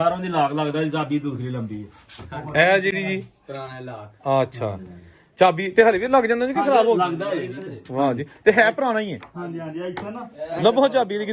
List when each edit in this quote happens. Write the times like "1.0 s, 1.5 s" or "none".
none